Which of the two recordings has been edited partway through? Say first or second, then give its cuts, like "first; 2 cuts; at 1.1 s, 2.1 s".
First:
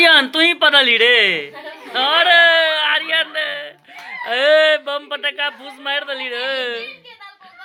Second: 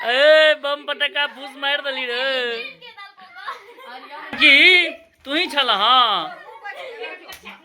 second; 1 cut; at 4.4 s